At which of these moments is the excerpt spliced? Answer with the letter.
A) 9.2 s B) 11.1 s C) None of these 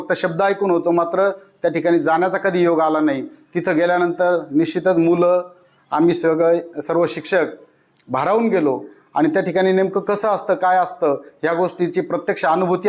C